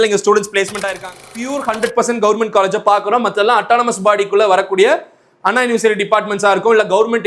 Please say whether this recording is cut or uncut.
cut